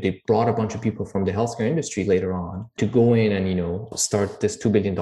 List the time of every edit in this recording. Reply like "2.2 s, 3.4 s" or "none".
2.7 s, 3.9 s